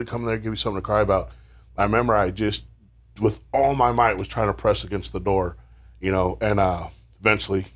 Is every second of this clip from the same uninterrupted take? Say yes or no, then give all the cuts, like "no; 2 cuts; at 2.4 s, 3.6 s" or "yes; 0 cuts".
yes; 0 cuts